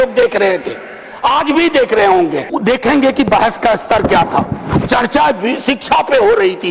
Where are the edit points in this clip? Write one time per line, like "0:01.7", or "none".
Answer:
0:02.5